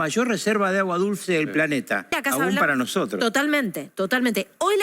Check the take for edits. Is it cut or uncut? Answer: cut